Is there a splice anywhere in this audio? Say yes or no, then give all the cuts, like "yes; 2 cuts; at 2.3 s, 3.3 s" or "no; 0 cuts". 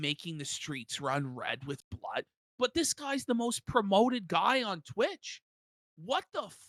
no; 0 cuts